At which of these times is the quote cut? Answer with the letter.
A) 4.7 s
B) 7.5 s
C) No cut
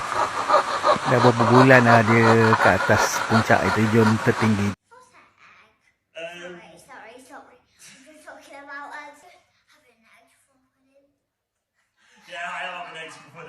A